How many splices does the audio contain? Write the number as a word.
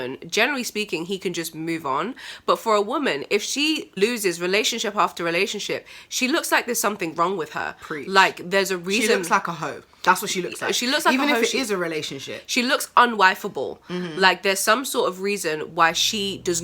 one